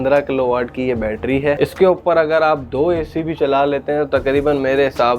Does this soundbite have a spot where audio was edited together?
yes; 1 cut; at 1.6 s

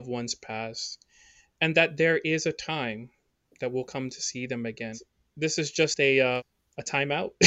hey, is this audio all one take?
no; 2 cuts; at 5.0 s, 6.5 s

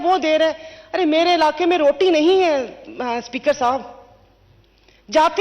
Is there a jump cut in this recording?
no; 0 cuts

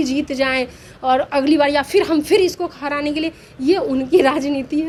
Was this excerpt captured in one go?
yes; 0 cuts

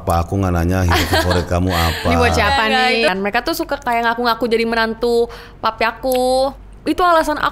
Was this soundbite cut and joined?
yes; 2 cuts; at 3.1 s, 6.6 s

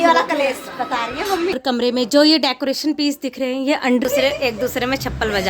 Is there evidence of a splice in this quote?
yes; 2 cuts; at 1.6 s, 4.0 s

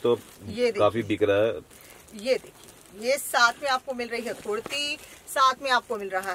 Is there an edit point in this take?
yes; 1 cut; at 1.6 s

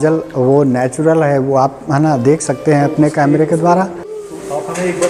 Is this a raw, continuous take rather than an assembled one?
yes; 0 cuts

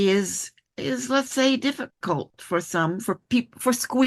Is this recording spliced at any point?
no; 0 cuts

